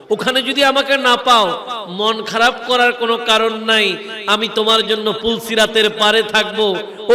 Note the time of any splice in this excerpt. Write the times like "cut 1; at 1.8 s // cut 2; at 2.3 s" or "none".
none